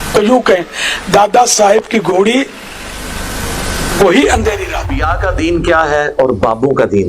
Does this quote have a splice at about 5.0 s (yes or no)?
yes